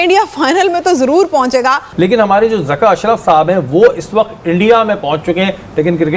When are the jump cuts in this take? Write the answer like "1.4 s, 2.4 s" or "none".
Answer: 1.9 s